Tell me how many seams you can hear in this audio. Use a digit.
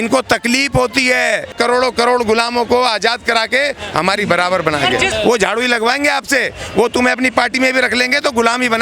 2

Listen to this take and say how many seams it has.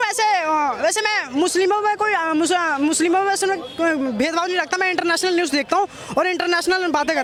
0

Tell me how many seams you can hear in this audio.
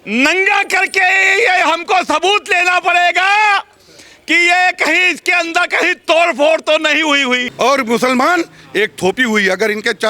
1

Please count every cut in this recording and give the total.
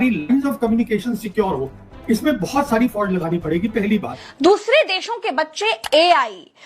1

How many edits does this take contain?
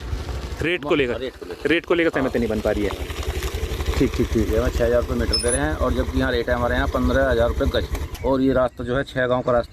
1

